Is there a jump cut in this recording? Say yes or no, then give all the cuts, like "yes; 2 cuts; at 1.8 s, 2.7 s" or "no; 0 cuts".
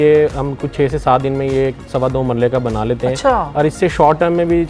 no; 0 cuts